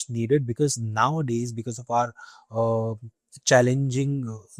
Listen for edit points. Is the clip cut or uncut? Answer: uncut